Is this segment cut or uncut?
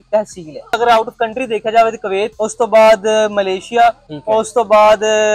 cut